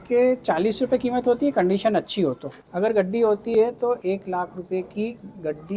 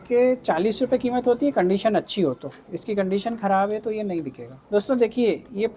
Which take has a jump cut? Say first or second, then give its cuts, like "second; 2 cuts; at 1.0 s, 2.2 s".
first; 1 cut; at 2.6 s